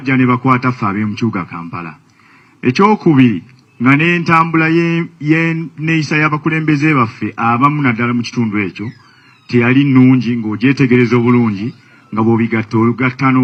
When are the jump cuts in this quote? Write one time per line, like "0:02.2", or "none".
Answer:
none